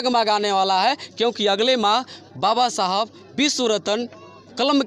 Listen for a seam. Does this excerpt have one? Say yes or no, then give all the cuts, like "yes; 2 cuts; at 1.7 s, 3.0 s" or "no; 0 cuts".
no; 0 cuts